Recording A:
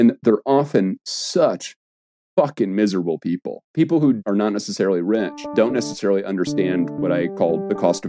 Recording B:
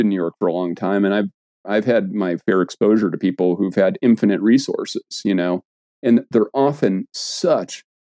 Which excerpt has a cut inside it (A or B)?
A